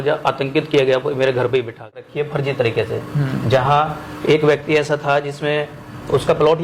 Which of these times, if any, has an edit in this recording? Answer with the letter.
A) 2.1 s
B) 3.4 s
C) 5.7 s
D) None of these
A